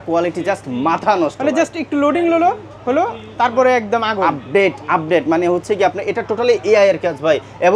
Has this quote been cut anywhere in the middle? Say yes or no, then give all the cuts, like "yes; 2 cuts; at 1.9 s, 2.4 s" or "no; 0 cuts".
no; 0 cuts